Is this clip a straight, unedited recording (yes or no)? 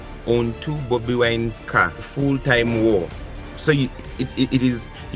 no